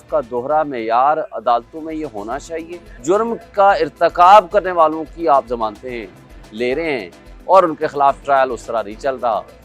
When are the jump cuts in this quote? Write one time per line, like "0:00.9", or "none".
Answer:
0:03.0